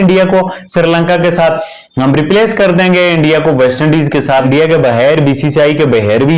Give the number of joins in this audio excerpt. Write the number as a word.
one